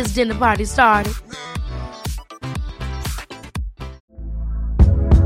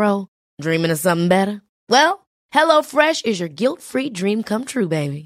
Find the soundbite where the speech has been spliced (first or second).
first